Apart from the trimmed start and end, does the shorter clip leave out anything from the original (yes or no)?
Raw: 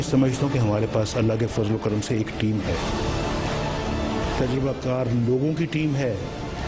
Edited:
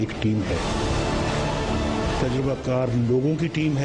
no